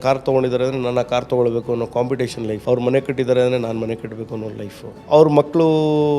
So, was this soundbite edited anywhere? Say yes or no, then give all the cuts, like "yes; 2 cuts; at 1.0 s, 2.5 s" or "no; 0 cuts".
yes; 2 cuts; at 2.6 s, 4.9 s